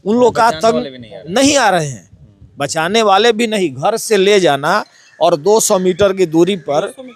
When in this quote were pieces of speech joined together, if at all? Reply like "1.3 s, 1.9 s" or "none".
none